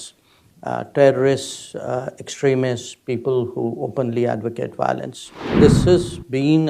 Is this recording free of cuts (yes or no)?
no